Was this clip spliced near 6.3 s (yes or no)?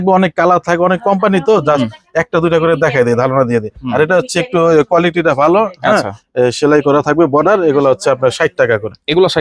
no